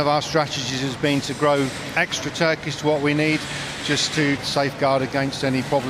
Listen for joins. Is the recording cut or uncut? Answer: cut